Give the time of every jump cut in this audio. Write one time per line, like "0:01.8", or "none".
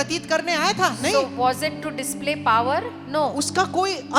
none